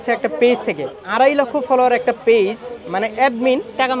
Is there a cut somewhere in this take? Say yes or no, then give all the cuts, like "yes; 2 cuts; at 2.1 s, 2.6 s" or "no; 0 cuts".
yes; 1 cut; at 1.0 s